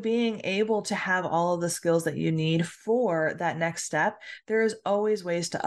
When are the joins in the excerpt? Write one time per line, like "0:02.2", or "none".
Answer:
none